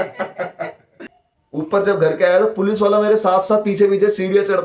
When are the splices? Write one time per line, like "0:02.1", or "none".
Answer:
0:01.0